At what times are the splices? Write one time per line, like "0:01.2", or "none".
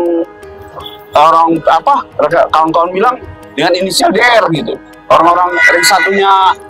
none